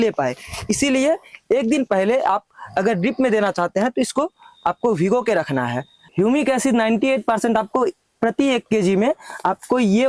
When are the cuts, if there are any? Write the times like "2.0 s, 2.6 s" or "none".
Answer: none